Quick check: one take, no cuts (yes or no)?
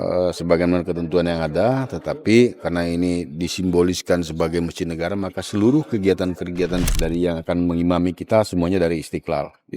no